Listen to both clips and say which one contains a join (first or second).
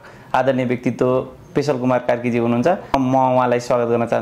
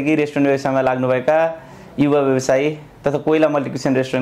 first